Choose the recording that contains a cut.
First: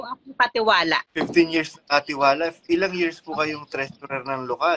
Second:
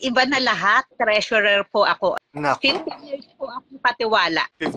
second; 2 cuts; at 0.9 s, 2.2 s

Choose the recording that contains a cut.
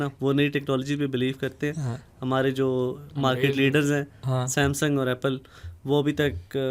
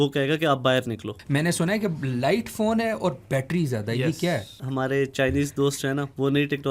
second; 2 cuts; at 1.2 s, 4.6 s

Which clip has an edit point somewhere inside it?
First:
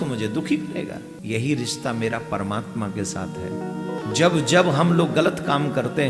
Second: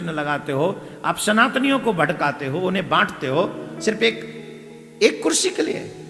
first; 2 cuts; at 1.1 s, 4.0 s

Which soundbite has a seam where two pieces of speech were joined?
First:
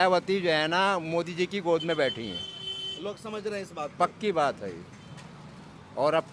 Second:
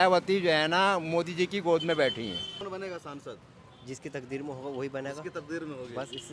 second; 1 cut; at 2.6 s

